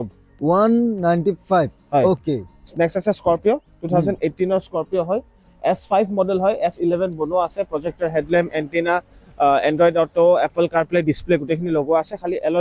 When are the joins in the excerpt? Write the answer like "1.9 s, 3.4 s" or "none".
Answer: none